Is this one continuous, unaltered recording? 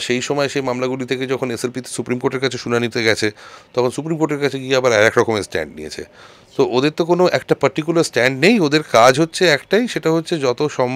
yes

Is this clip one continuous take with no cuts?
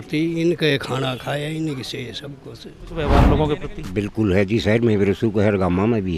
no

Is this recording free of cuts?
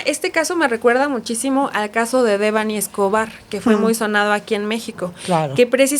yes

